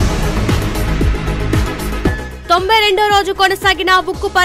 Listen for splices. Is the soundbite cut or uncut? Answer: cut